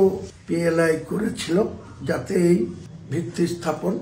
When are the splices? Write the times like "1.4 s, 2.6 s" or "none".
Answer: none